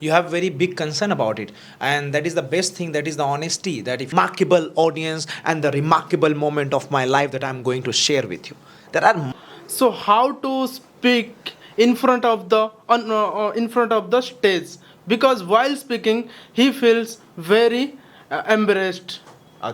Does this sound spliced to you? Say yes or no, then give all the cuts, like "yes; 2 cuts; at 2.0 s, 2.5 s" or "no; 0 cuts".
yes; 2 cuts; at 4.1 s, 9.3 s